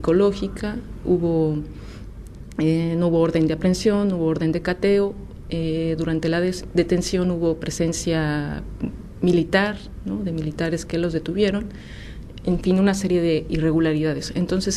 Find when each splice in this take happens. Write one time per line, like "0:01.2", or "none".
0:11.1